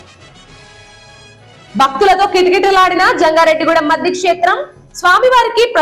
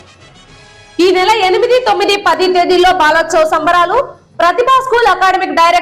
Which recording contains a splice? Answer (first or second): first